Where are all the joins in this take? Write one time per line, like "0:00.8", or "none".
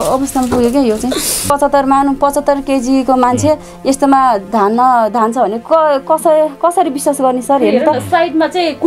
0:01.5